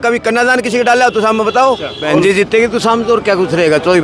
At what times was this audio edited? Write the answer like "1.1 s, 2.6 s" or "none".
1.9 s

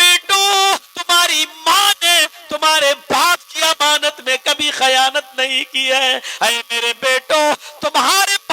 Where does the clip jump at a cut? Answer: 0.9 s

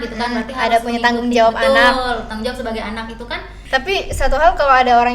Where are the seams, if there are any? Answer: 3.5 s

